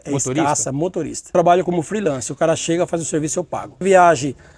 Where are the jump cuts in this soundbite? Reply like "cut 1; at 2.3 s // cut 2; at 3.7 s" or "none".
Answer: cut 1; at 1.3 s // cut 2; at 3.8 s